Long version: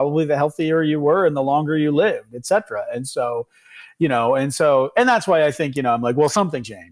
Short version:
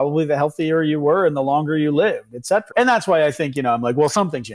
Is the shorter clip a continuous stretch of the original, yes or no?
no